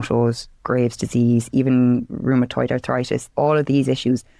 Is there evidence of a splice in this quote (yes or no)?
yes